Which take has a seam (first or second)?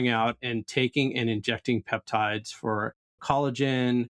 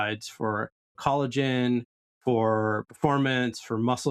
second